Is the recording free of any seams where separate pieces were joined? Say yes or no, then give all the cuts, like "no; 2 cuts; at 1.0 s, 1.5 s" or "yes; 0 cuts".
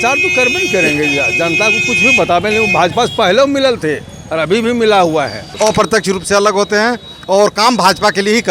no; 1 cut; at 5.5 s